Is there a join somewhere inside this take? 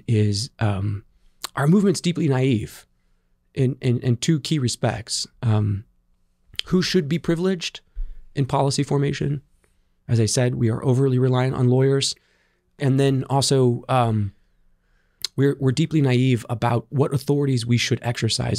yes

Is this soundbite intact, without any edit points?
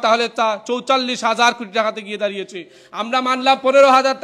yes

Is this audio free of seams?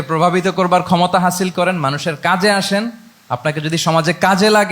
yes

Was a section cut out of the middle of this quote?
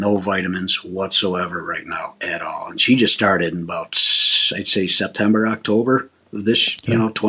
no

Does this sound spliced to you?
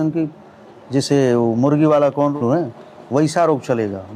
yes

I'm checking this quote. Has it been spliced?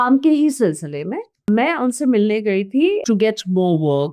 yes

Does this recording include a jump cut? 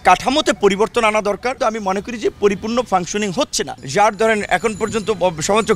yes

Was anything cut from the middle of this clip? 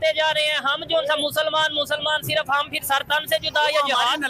no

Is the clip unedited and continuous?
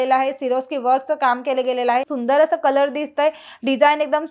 no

